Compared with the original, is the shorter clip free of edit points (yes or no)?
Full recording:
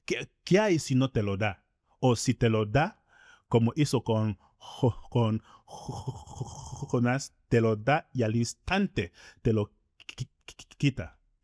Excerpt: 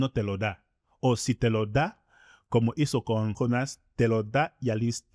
no